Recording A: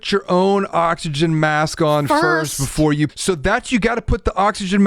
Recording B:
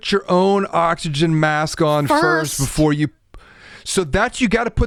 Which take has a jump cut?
A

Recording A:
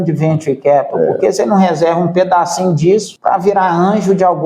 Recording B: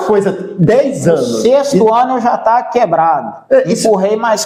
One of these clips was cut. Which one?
A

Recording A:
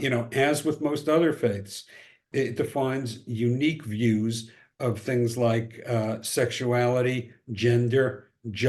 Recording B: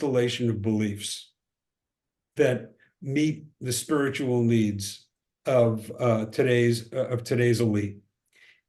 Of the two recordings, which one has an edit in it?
A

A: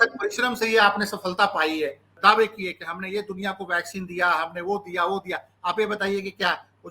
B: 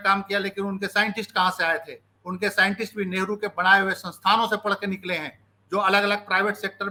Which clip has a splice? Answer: A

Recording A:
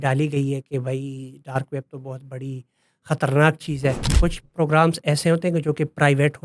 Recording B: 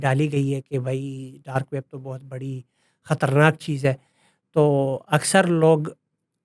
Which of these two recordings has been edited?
A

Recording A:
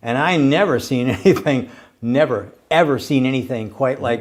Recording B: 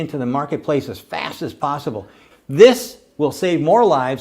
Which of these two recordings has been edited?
B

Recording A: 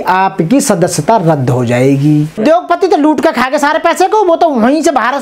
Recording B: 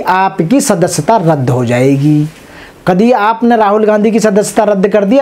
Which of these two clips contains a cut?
A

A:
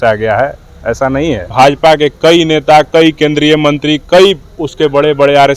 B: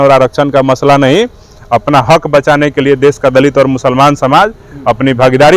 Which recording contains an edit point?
A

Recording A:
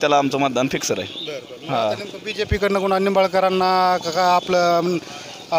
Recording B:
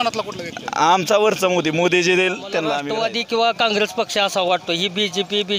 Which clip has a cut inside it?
B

